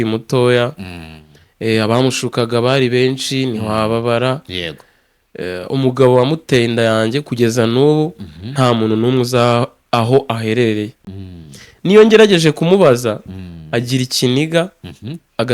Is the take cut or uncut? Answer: uncut